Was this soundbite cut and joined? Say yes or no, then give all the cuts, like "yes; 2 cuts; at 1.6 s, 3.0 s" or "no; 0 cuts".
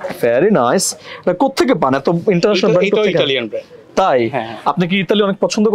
no; 0 cuts